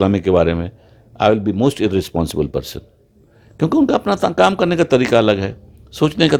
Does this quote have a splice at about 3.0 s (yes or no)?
no